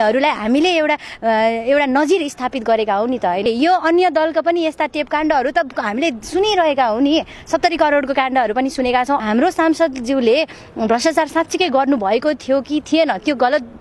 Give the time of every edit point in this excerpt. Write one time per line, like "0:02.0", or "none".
0:03.4
0:09.2